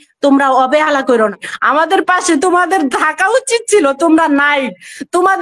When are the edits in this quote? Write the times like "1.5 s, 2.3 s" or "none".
1.5 s